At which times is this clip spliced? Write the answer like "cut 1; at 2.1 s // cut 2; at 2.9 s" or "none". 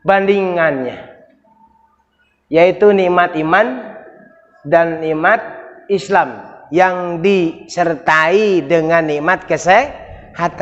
none